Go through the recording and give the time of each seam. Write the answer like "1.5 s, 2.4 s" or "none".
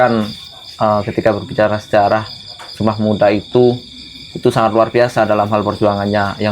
none